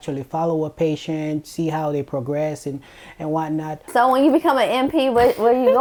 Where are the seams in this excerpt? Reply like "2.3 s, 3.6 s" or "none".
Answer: none